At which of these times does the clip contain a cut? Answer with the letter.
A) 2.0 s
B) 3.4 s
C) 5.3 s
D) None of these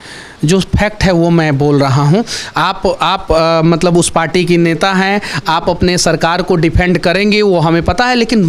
D